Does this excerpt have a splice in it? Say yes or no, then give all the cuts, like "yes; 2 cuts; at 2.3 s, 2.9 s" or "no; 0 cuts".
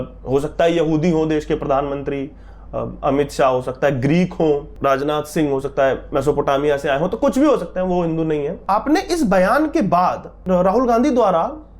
yes; 2 cuts; at 4.7 s, 8.6 s